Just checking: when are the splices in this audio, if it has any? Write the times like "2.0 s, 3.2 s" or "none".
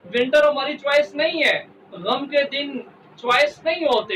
none